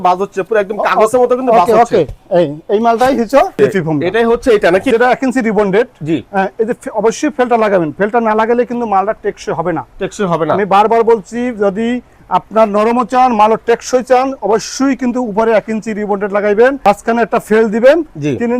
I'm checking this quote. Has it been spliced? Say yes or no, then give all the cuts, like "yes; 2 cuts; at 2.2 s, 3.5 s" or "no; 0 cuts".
yes; 2 cuts; at 4.9 s, 16.8 s